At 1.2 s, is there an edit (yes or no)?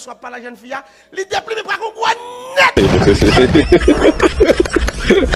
no